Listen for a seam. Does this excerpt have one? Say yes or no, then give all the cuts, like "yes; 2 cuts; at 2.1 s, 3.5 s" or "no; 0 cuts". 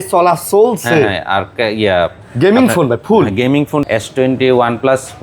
yes; 1 cut; at 3.8 s